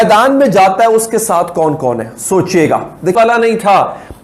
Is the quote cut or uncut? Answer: uncut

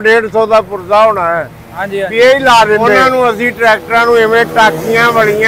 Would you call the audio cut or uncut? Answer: cut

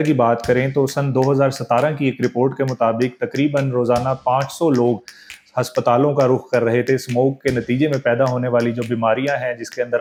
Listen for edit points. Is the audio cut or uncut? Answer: uncut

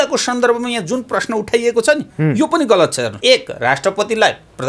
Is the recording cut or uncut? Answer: cut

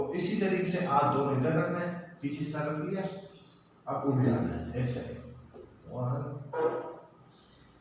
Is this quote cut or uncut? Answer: uncut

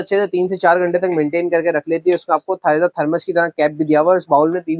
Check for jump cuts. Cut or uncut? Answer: uncut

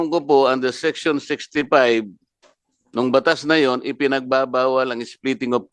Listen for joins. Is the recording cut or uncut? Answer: uncut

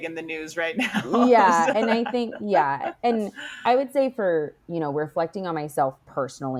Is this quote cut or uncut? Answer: uncut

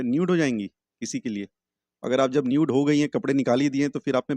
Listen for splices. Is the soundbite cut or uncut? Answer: uncut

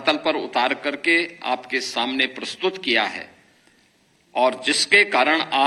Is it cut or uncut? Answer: uncut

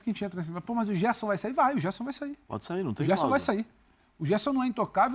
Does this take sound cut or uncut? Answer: uncut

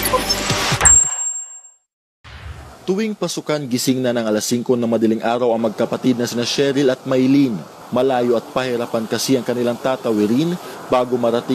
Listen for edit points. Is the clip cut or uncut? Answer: uncut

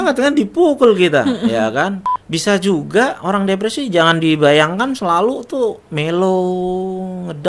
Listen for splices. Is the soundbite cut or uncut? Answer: cut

